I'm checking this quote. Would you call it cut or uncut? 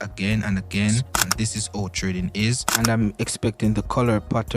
cut